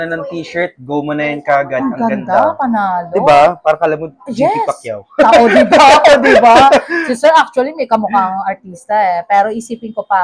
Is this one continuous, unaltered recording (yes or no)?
yes